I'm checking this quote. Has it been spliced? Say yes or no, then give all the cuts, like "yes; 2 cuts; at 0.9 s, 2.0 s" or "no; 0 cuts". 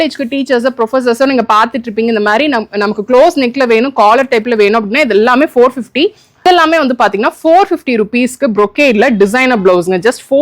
yes; 1 cut; at 6.4 s